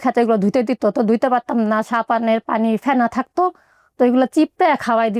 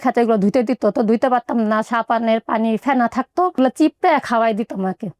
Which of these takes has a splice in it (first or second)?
second